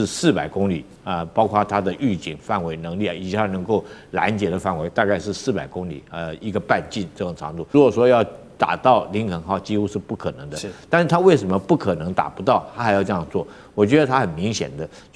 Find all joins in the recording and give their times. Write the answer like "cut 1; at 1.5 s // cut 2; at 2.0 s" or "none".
cut 1; at 7.7 s